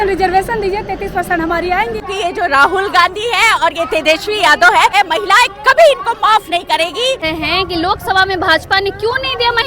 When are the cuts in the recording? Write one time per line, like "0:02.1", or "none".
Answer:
0:02.1
0:04.9
0:07.3